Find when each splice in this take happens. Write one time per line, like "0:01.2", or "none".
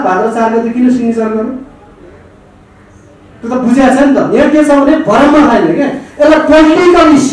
none